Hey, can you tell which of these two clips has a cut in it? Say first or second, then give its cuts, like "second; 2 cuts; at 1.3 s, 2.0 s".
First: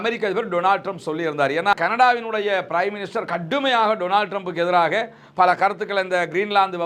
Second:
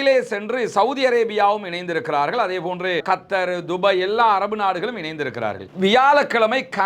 second; 1 cut; at 5.7 s